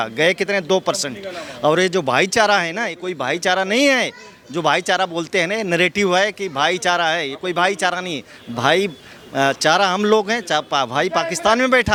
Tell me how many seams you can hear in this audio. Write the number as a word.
zero